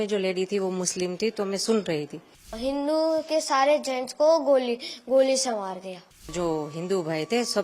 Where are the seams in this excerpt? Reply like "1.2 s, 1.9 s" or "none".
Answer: 2.6 s, 6.3 s